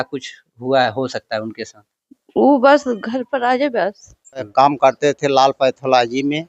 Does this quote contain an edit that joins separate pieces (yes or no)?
yes